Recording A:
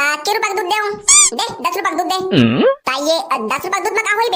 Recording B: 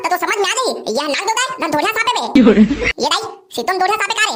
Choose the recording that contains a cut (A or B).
A